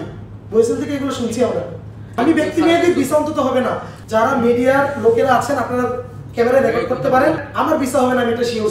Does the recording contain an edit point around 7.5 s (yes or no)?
yes